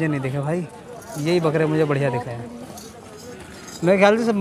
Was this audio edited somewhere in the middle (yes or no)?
no